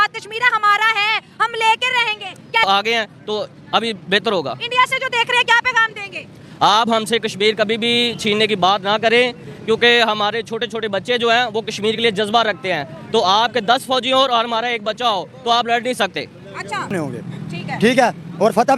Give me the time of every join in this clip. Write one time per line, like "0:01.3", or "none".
0:02.6
0:16.9